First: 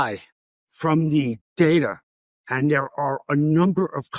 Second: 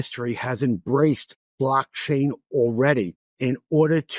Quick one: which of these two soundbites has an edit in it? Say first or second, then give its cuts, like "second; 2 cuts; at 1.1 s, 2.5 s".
second; 1 cut; at 3.2 s